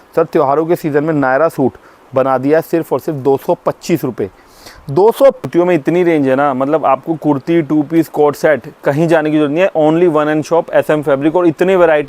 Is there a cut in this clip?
yes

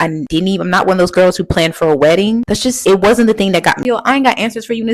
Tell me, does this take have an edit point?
yes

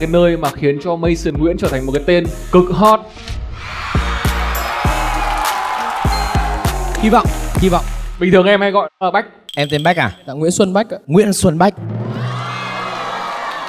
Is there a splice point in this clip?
no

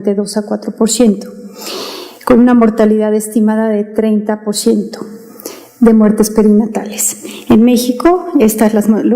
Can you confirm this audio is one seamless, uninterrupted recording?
no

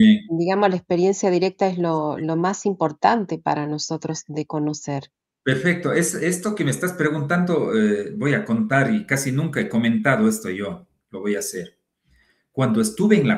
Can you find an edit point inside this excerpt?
no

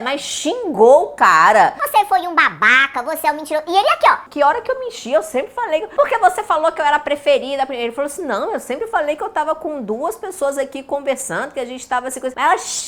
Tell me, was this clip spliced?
no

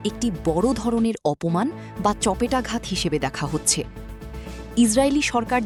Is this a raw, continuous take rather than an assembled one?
yes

